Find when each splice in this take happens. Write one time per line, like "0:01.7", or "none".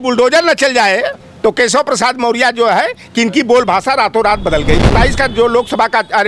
0:01.2
0:04.9